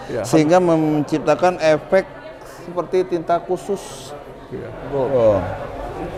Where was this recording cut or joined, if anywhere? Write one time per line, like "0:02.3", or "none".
0:05.1